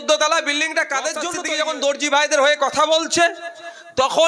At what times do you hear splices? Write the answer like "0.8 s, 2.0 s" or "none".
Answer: 1.4 s